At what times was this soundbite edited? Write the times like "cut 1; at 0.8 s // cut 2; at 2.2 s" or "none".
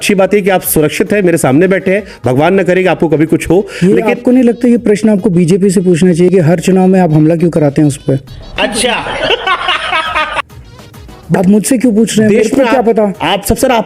none